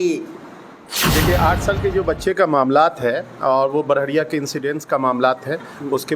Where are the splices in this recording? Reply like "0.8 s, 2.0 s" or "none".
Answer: 1.0 s